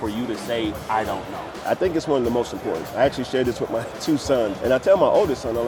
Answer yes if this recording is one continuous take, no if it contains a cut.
no